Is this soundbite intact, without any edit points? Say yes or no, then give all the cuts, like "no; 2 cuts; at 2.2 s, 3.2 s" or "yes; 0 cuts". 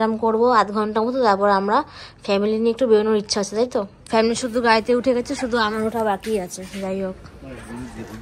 no; 1 cut; at 4.0 s